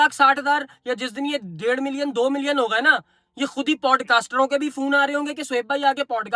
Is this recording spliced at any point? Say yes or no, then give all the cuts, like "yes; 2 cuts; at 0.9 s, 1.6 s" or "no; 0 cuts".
no; 0 cuts